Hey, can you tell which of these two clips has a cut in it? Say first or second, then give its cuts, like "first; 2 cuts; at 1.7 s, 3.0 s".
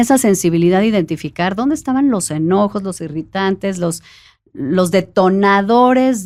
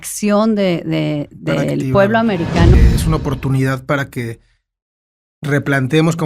second; 1 cut; at 2.7 s